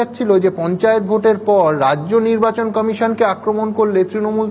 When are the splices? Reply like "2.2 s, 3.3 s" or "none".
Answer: none